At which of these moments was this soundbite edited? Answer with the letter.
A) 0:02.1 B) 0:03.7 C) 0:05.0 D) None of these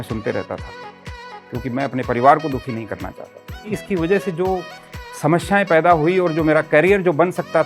B